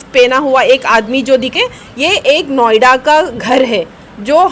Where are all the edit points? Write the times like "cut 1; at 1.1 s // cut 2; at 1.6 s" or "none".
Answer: cut 1; at 1.5 s